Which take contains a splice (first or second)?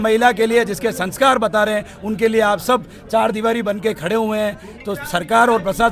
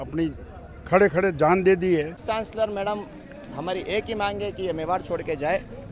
second